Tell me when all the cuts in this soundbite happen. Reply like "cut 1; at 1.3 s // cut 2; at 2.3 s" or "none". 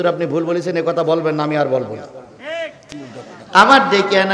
cut 1; at 2.8 s